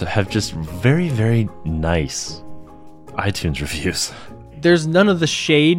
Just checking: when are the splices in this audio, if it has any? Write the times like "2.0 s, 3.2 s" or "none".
4.5 s